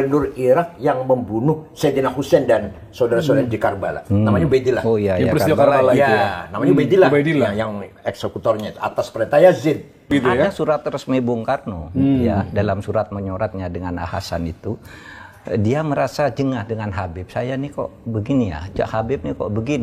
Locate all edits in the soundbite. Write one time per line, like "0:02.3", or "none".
0:10.1

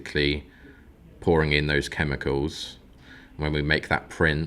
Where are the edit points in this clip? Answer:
0:02.9

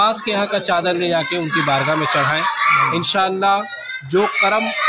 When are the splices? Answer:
none

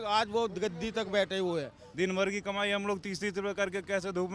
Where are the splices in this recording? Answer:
0:01.8

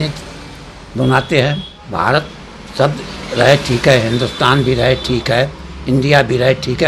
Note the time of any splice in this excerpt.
0:01.7

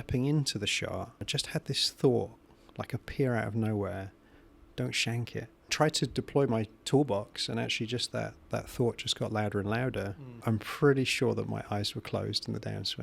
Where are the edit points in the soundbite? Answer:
0:01.3
0:05.7
0:10.3

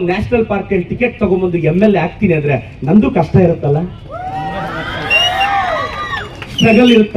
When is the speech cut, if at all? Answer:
none

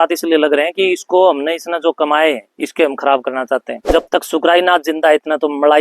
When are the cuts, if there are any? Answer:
0:03.7

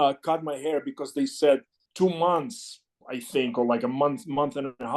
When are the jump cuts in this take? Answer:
0:01.8

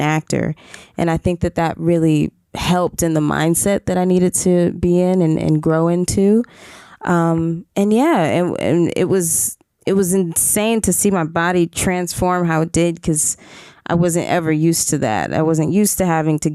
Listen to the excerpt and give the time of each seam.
none

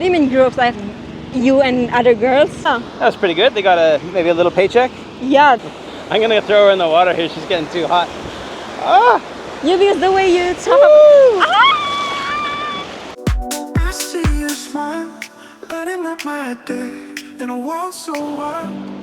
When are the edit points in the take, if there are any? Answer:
0:02.7
0:05.6
0:13.2

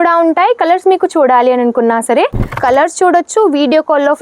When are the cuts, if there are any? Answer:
0:02.5

